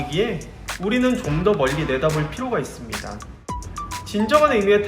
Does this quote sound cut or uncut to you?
cut